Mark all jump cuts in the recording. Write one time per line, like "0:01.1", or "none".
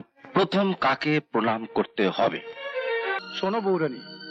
0:03.2